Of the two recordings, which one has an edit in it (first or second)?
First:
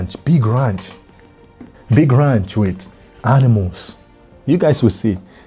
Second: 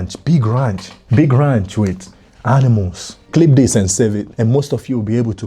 second